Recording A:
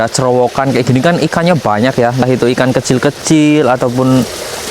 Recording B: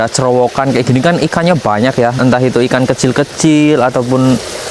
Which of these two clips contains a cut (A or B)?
A